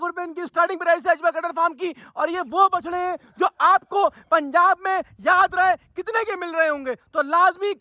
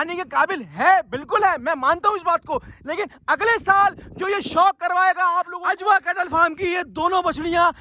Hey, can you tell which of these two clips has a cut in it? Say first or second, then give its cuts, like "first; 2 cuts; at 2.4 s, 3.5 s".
second; 1 cut; at 5.5 s